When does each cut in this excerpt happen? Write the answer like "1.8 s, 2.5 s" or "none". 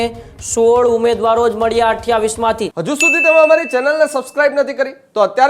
2.7 s